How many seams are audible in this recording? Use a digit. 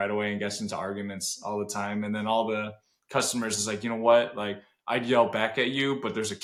0